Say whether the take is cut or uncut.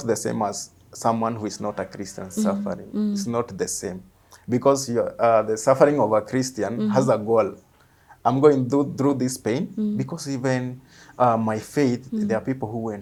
uncut